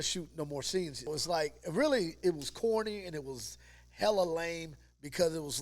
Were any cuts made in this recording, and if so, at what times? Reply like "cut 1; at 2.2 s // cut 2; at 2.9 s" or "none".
cut 1; at 1.1 s